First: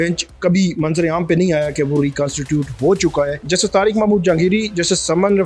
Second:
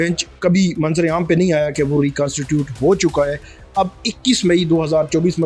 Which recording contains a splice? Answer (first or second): first